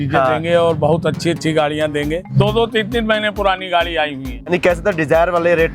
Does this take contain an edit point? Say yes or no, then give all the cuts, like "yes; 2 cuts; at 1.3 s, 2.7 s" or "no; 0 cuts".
yes; 2 cuts; at 2.2 s, 4.5 s